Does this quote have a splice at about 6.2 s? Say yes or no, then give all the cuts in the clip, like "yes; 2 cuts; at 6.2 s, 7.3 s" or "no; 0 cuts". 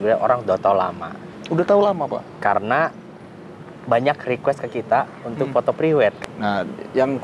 yes; 1 cut; at 6.2 s